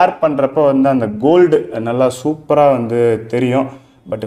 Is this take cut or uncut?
uncut